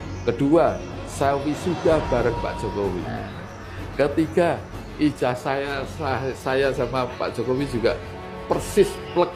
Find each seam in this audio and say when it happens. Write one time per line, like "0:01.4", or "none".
none